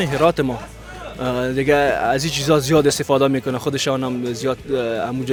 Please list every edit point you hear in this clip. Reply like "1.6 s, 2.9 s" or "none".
none